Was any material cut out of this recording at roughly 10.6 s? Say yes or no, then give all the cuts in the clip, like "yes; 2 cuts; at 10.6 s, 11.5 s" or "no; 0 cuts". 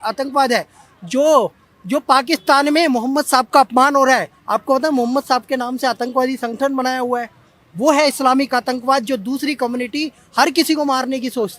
no; 0 cuts